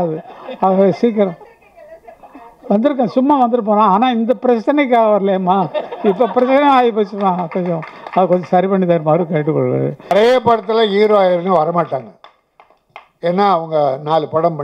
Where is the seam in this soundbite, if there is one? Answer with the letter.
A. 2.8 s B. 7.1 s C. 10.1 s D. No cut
C